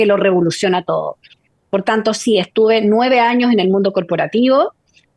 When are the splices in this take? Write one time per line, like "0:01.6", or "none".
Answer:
none

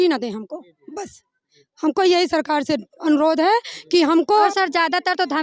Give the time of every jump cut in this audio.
0:04.5

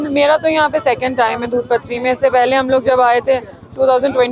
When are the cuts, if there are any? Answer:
none

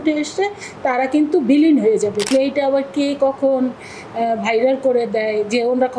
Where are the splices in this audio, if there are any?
0:02.3

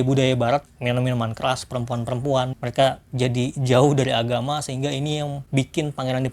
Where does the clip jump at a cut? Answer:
0:02.5
0:05.4

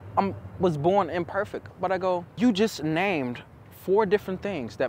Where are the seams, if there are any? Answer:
0:02.3

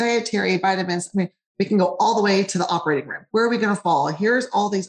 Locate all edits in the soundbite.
0:03.2

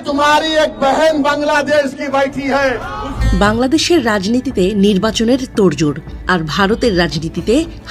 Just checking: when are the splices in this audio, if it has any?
0:03.2

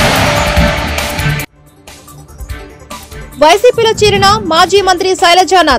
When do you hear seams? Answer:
0:02.6

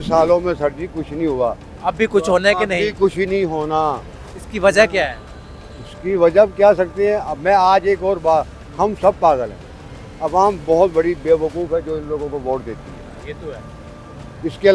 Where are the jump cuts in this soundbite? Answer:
none

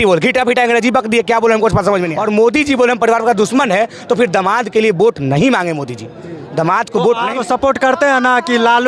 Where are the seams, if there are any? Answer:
0:02.1
0:07.3

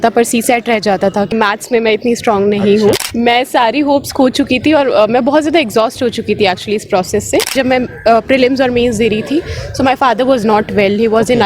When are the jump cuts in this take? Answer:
0:01.3
0:03.1
0:07.5

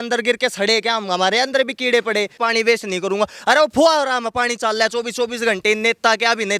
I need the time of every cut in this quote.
0:02.3

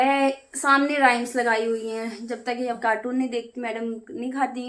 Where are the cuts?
none

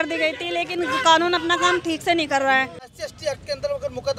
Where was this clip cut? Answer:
0:03.0

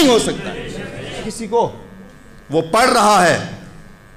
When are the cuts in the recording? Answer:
0:01.3

